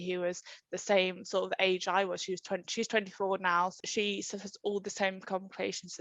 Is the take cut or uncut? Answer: cut